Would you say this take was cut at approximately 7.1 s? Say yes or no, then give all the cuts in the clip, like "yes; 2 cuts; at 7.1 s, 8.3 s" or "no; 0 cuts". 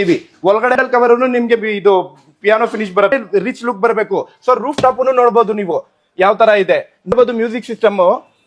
yes; 3 cuts; at 0.8 s, 3.1 s, 7.1 s